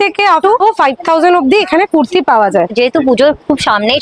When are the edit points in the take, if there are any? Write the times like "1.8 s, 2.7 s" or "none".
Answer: 2.7 s